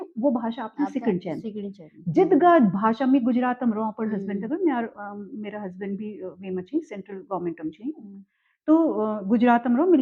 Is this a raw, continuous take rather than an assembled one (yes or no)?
yes